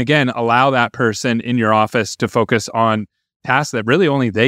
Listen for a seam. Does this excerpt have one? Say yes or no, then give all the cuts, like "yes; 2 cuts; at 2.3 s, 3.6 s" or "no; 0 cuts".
no; 0 cuts